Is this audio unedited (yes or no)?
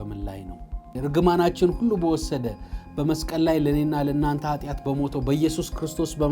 no